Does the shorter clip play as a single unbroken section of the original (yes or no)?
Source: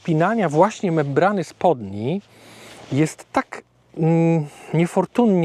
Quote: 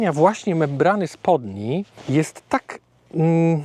no